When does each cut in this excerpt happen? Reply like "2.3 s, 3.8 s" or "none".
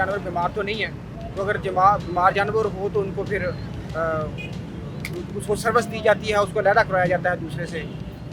none